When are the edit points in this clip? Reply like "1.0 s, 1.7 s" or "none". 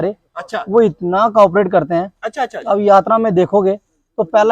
none